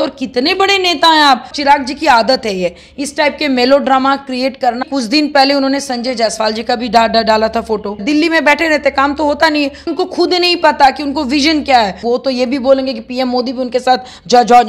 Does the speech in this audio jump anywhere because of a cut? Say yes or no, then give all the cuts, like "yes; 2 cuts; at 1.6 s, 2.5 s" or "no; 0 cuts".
yes; 5 cuts; at 1.5 s, 4.8 s, 8.0 s, 9.9 s, 12.0 s